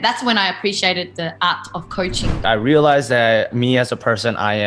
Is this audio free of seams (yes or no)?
no